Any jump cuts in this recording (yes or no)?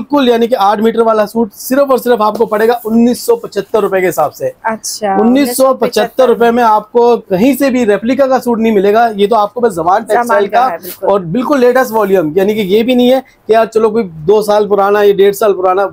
no